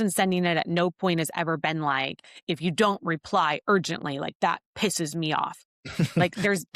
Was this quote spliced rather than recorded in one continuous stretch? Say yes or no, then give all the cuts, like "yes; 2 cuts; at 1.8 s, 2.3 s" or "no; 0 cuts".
no; 0 cuts